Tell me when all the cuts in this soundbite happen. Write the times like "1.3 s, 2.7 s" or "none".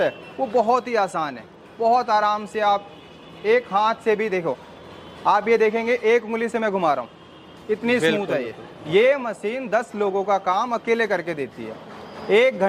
8.8 s